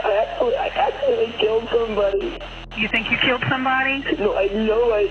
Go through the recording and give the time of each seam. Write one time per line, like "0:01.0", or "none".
none